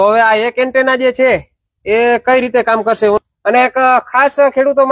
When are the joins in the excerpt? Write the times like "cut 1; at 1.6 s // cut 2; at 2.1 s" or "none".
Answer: cut 1; at 3.2 s